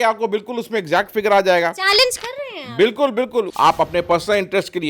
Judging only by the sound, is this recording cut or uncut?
cut